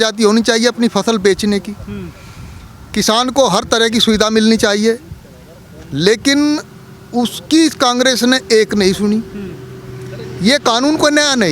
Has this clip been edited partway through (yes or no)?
no